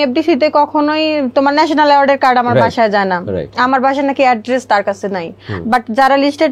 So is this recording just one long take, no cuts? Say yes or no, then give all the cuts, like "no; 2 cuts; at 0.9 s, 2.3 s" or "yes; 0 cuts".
yes; 0 cuts